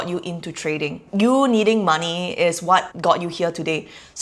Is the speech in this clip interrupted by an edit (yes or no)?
yes